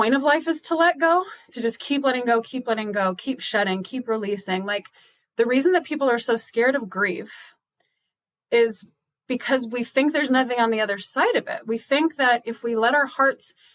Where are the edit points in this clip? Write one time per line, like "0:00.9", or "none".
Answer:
none